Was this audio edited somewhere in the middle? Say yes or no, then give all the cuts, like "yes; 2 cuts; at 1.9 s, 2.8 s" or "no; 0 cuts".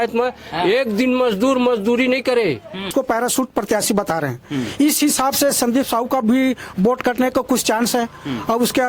yes; 1 cut; at 2.9 s